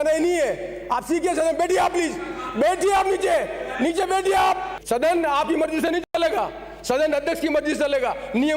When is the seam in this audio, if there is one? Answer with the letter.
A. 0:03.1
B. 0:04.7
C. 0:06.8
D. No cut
B